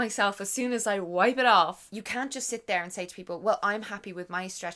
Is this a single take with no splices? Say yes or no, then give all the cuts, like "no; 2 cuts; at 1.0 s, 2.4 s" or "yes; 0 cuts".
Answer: no; 1 cut; at 1.8 s